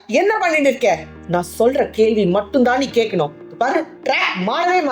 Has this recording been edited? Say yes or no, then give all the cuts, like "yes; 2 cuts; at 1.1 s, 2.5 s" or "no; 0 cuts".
no; 0 cuts